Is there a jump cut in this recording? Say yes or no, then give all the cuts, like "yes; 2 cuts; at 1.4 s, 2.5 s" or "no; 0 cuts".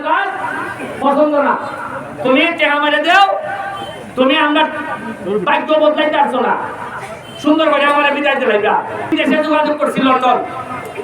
yes; 1 cut; at 9.1 s